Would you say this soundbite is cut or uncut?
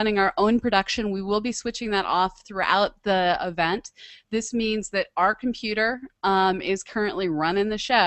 cut